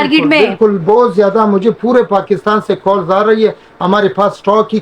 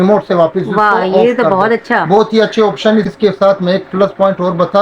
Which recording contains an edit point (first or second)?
second